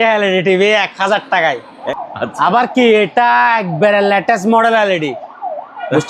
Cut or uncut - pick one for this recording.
cut